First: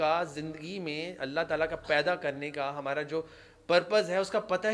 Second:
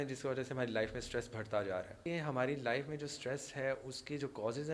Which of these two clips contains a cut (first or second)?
second